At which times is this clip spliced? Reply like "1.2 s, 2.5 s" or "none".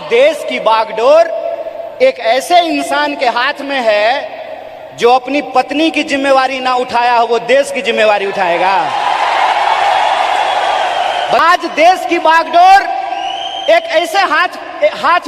11.4 s